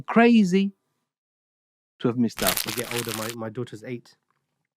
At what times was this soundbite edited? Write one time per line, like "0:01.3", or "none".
0:02.6